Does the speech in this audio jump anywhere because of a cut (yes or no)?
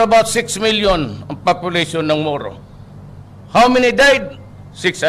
no